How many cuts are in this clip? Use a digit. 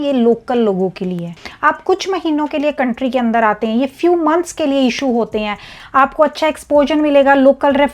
2